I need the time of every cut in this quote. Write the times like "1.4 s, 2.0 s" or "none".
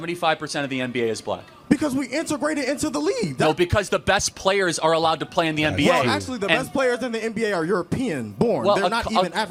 none

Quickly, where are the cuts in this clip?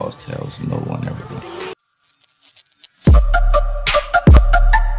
1.8 s

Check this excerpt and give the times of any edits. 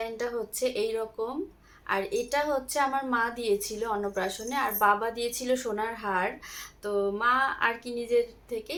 none

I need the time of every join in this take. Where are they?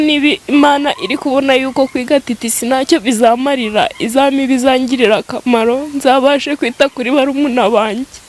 none

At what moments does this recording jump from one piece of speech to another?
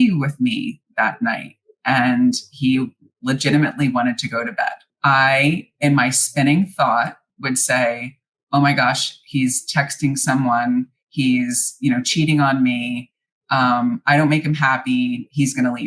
4.8 s, 7.3 s

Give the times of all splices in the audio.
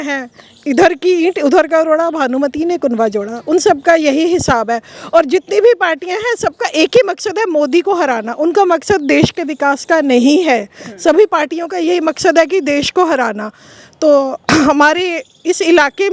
none

